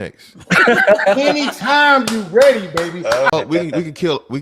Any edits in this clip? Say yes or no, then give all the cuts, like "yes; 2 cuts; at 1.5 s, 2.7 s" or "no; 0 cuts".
yes; 1 cut; at 3.3 s